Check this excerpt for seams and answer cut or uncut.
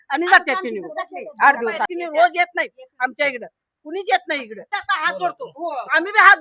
cut